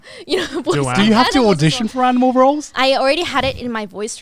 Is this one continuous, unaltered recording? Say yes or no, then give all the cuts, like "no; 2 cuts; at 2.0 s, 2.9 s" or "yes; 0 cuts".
no; 1 cut; at 2.7 s